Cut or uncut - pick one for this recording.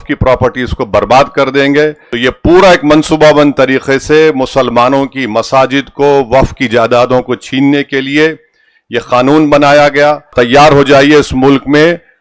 cut